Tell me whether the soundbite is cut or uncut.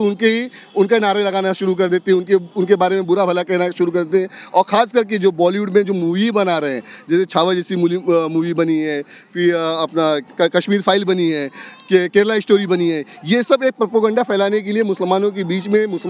uncut